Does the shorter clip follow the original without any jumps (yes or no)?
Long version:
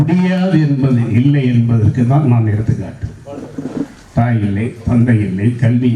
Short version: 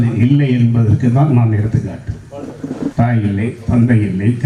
no